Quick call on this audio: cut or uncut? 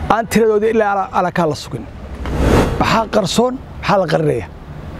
cut